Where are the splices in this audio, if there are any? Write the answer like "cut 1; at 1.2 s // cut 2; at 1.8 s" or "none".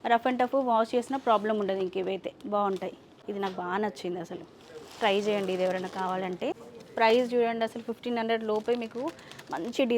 cut 1; at 3.1 s // cut 2; at 6.7 s